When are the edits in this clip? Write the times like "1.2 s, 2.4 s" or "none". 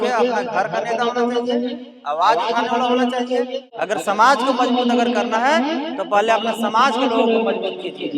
3.6 s